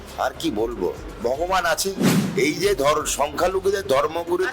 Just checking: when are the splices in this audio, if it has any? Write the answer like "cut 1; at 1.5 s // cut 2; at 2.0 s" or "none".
cut 1; at 2.2 s